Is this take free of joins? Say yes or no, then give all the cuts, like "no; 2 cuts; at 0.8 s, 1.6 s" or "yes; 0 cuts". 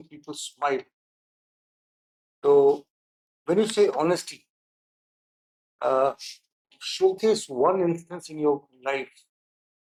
yes; 0 cuts